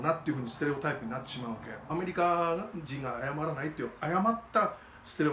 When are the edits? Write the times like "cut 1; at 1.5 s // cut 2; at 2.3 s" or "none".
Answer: cut 1; at 1.9 s